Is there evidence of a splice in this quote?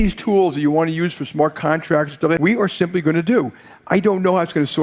yes; 1 cut; at 2.4 s

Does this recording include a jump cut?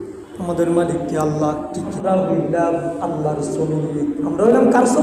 yes; 1 cut; at 2.0 s

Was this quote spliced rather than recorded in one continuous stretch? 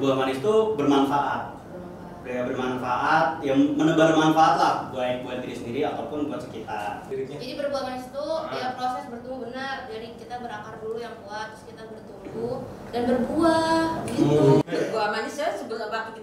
yes; 2 cuts; at 7.0 s, 14.6 s

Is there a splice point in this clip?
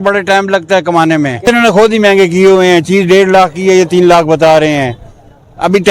yes; 1 cut; at 1.4 s

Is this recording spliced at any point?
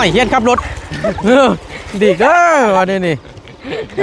no; 0 cuts

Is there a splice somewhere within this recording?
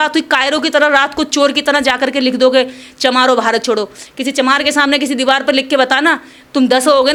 no; 0 cuts

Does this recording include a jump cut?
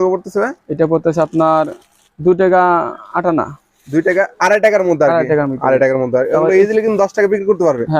no; 0 cuts

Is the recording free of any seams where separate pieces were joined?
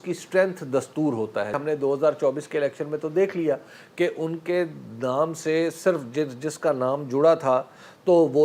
no; 1 cut; at 1.6 s

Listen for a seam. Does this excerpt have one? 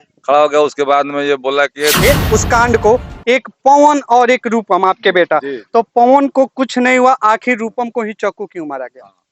yes; 1 cut; at 2.0 s

